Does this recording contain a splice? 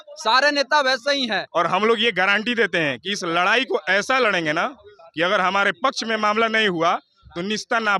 yes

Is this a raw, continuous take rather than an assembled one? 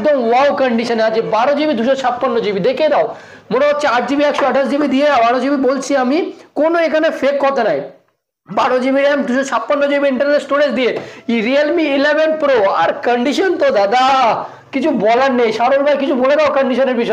yes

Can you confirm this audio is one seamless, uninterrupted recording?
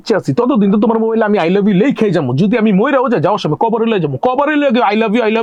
yes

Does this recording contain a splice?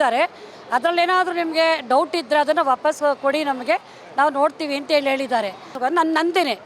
yes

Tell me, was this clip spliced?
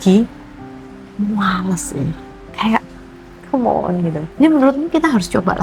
yes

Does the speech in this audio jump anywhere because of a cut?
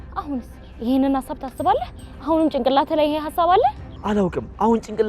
yes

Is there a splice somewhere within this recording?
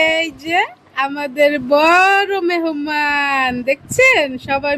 no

